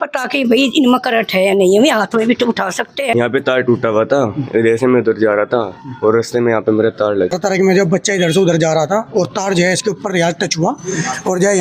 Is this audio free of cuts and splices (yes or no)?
no